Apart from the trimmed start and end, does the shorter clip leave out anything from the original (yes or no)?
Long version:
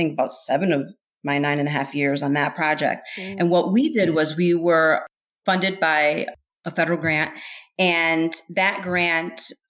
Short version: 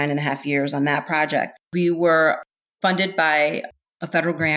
yes